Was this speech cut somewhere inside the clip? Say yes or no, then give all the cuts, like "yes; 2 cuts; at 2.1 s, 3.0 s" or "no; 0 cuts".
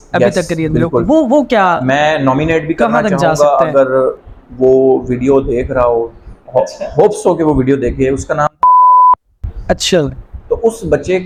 no; 0 cuts